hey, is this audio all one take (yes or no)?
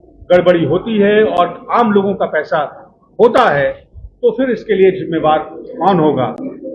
yes